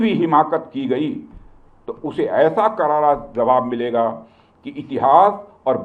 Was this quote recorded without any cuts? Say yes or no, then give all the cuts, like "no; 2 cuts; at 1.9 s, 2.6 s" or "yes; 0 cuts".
yes; 0 cuts